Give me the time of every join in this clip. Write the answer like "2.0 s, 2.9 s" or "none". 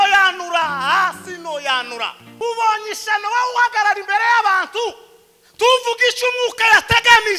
2.2 s